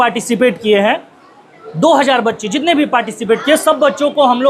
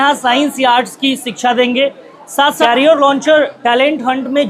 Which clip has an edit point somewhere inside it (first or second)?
second